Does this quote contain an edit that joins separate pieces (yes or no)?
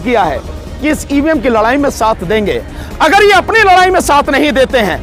no